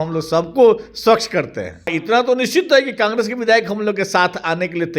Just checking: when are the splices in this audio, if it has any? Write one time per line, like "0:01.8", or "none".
0:01.9